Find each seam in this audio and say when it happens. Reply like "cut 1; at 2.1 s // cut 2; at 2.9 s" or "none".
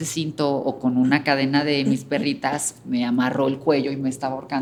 none